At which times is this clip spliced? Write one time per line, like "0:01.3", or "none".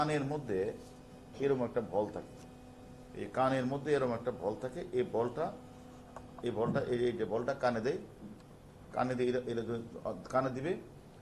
0:03.0

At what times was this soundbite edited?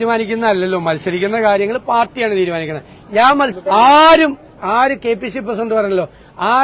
0:03.6

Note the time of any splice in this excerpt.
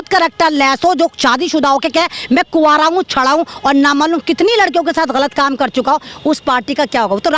none

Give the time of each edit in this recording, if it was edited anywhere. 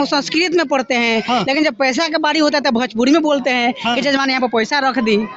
none

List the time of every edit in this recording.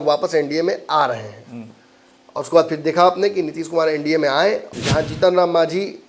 0:04.7

